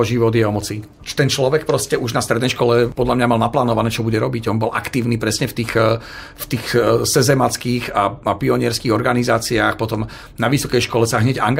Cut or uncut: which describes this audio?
uncut